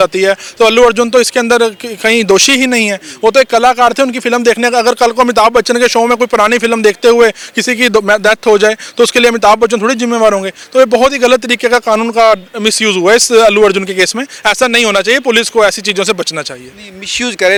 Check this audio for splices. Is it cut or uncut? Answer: uncut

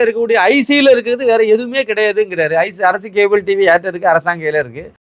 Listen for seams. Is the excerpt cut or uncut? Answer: uncut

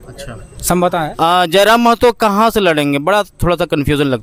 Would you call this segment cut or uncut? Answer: uncut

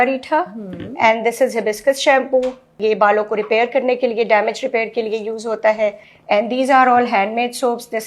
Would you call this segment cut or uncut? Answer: cut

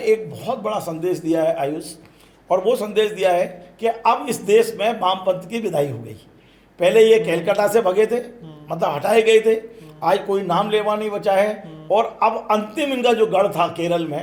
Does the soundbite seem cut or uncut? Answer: uncut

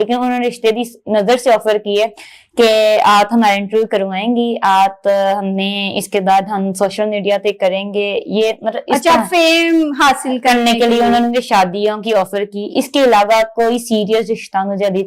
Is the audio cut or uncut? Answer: uncut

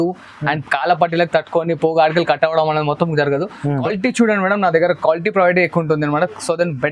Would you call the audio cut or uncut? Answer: cut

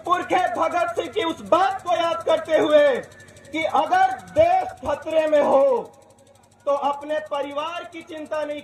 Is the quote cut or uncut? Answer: uncut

